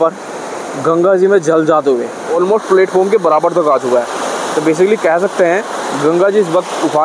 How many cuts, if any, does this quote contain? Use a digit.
1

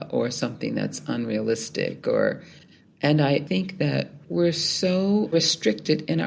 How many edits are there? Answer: 1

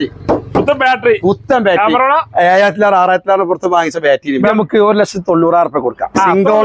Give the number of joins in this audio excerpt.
1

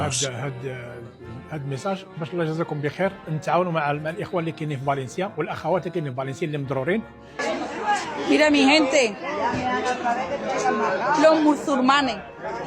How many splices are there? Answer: 1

